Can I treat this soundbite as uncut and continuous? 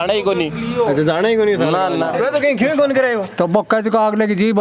no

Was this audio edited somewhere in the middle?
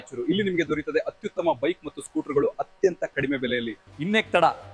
yes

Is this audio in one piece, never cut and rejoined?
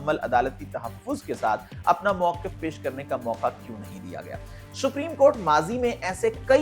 yes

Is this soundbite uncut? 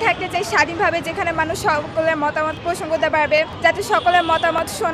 no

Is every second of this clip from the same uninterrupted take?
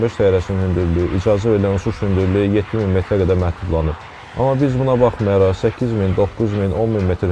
yes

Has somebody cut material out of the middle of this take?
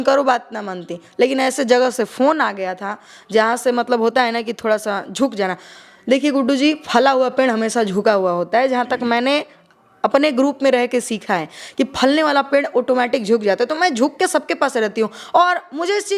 no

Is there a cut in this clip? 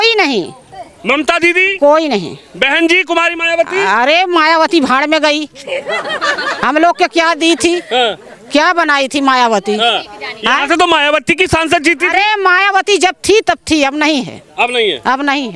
no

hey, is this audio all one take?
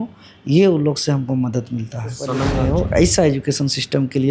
no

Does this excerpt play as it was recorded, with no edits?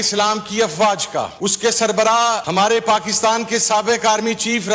no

